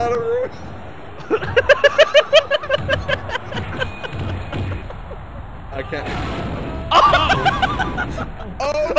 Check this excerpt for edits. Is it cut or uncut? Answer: cut